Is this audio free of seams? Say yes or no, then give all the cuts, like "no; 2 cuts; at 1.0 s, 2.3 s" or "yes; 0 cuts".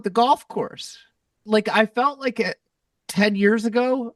no; 1 cut; at 1.4 s